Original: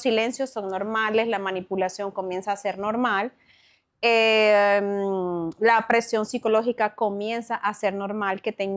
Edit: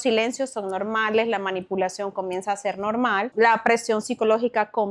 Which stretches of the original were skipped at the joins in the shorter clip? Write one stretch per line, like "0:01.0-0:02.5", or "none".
0:03.3-0:05.5

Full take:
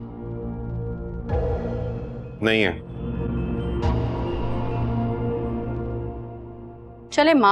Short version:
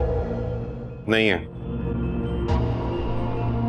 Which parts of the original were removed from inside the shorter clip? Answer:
none

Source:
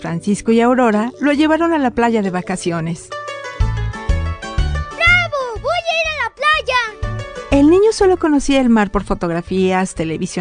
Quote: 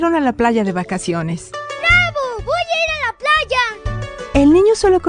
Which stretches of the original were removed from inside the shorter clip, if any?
0:03.3-0:04.9

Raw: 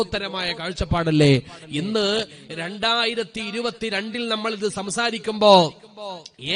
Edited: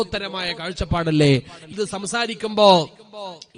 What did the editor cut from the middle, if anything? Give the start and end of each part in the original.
0:01.7-0:04.5

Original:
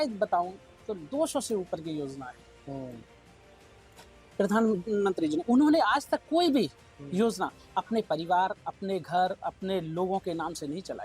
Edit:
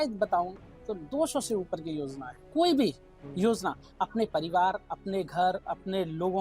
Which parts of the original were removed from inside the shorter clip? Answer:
0:02.5-0:06.2

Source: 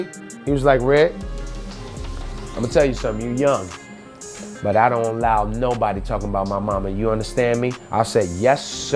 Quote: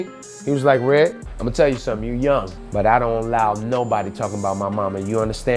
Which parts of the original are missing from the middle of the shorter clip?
0:01.3-0:02.4
0:03.7-0:04.5

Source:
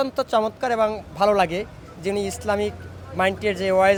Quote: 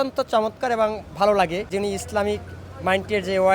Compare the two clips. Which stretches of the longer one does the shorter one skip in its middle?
0:01.7-0:02.0

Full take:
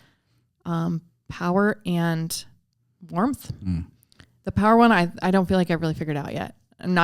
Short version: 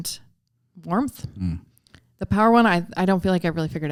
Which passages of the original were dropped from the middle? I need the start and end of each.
none

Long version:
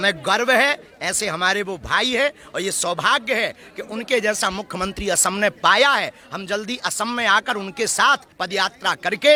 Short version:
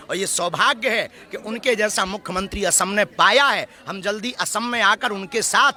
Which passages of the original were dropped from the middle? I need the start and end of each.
none

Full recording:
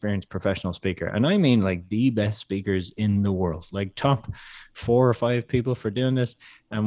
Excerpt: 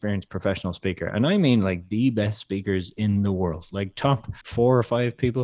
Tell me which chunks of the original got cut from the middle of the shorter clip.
0:04.4-0:04.7

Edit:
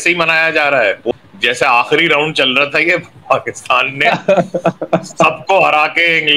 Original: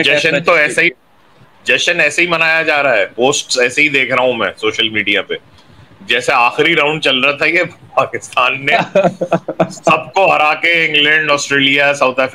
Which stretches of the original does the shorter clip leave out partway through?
0:03.2-0:05.8

